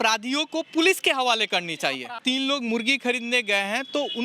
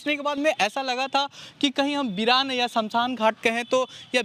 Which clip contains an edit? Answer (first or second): first